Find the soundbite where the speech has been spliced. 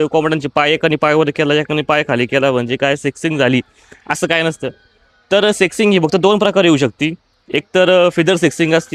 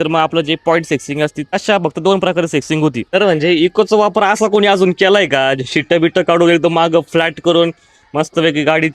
second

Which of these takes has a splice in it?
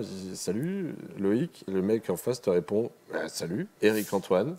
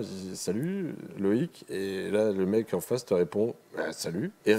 first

